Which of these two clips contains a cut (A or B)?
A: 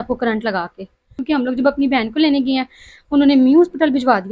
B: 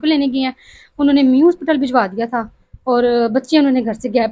A